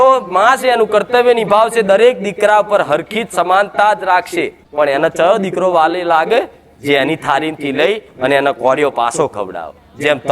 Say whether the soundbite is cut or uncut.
cut